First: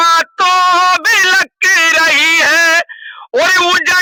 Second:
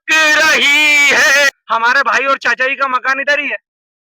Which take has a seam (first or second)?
second